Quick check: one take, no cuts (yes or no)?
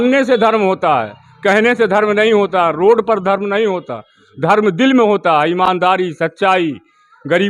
yes